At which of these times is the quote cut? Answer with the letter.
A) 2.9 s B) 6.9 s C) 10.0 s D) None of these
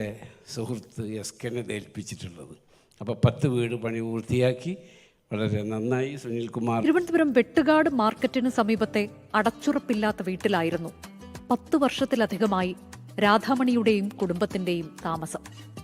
B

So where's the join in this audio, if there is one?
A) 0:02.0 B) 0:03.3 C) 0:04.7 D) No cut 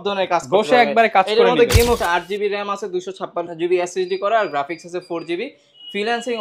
A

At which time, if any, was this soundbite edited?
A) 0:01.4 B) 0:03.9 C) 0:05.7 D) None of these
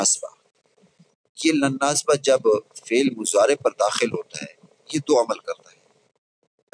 B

